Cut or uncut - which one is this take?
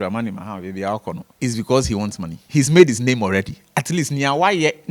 cut